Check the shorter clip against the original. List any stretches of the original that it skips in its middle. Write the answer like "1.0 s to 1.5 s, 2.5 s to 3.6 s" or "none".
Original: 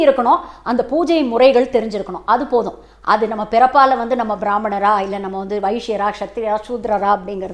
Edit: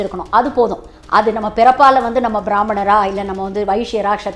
none